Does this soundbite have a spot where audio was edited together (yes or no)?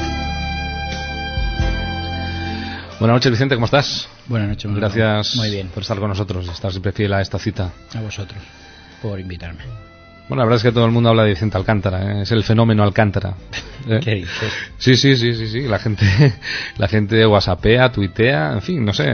no